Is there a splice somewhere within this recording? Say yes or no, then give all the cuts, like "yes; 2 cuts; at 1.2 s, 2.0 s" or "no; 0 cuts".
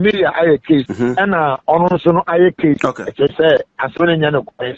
yes; 2 cuts; at 0.9 s, 2.8 s